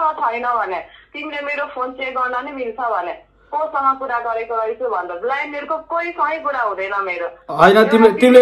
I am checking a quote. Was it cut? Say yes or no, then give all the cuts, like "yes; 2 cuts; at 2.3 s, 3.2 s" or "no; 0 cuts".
no; 0 cuts